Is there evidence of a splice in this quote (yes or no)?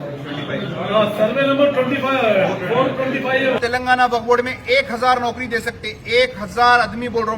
yes